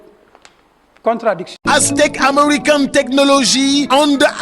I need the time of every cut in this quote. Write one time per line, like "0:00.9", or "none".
0:01.6